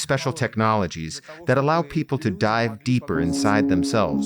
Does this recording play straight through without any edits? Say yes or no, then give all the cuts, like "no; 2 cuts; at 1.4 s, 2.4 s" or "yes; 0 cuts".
yes; 0 cuts